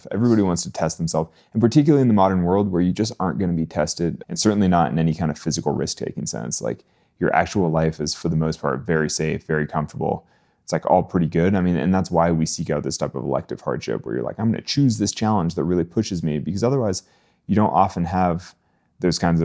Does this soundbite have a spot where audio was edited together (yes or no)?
yes